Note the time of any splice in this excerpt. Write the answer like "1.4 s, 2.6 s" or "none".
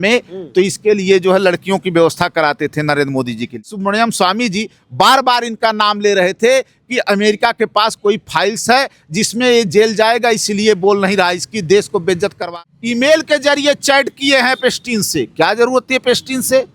3.7 s, 12.5 s